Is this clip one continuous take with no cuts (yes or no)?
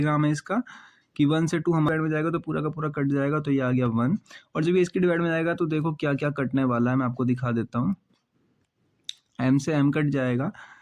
no